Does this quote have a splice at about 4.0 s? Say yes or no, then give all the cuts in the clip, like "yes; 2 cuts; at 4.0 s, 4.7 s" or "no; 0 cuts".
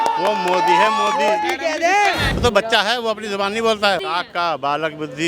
yes; 2 cuts; at 2.3 s, 4.0 s